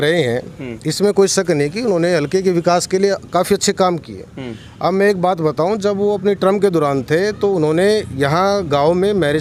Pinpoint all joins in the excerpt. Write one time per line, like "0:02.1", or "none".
none